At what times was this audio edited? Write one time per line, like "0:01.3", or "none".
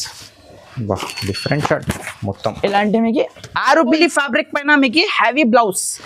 0:04.0